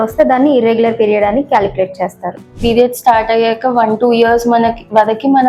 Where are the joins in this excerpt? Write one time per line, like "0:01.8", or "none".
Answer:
0:02.6